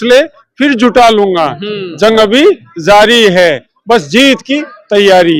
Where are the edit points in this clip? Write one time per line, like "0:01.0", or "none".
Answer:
none